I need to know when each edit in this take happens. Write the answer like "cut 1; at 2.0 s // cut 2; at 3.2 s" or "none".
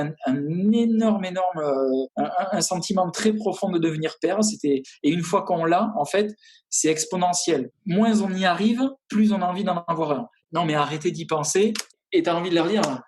cut 1; at 7.7 s // cut 2; at 10.4 s // cut 3; at 12.0 s

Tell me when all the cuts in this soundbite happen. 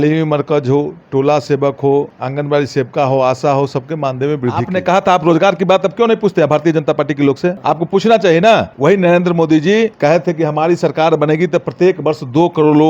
cut 1; at 2.2 s // cut 2; at 4.6 s // cut 3; at 7.6 s // cut 4; at 8.7 s // cut 5; at 9.9 s

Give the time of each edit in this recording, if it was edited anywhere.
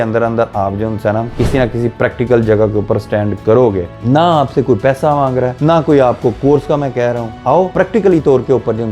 cut 1; at 3.9 s // cut 2; at 5.5 s // cut 3; at 7.5 s

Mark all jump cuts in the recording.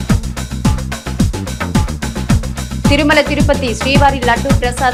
none

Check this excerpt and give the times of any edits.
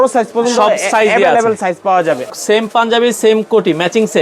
cut 1; at 2.3 s

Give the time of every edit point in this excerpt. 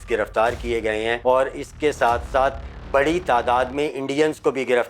cut 1; at 1.2 s

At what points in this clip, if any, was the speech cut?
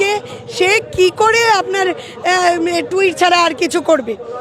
none

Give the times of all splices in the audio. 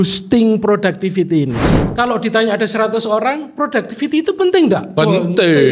cut 1; at 1.8 s

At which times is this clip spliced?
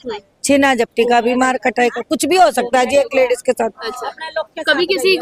none

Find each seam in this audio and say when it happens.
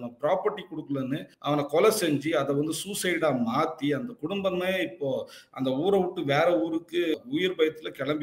cut 1; at 1.3 s // cut 2; at 7.1 s

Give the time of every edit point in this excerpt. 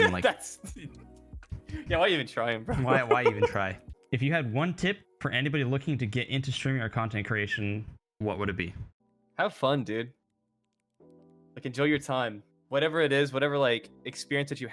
none

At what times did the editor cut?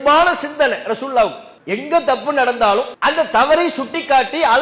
cut 1; at 2.9 s

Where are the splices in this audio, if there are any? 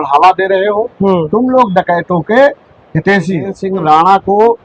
cut 1; at 3.6 s

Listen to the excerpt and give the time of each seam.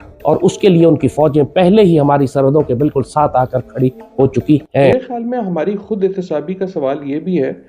cut 1; at 4.9 s

